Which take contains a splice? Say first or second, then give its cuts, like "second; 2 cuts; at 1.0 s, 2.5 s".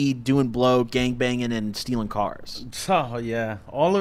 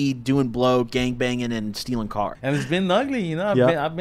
second; 1 cut; at 2.4 s